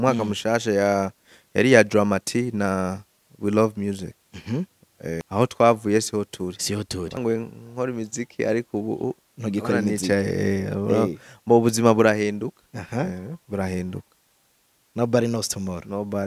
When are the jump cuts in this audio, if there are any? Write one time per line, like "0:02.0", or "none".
0:05.2
0:07.2